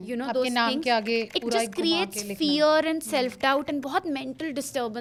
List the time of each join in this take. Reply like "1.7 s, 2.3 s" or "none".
none